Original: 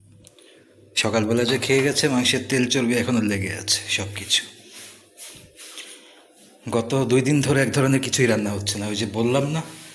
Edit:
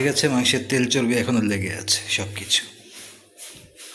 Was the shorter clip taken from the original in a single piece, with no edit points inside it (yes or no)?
yes